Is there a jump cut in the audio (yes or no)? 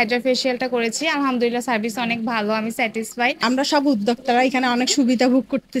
yes